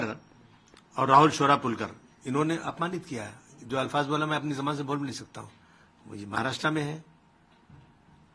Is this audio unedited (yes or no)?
yes